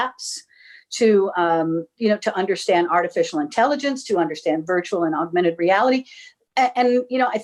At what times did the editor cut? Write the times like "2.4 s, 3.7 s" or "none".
none